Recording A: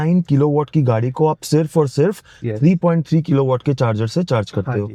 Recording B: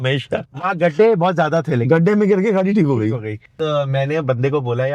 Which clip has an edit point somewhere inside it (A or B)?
B